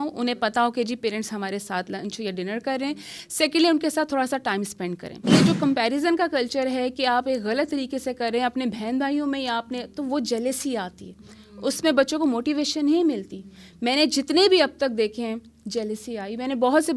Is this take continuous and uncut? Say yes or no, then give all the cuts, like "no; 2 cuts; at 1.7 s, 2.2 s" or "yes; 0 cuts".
no; 1 cut; at 5.3 s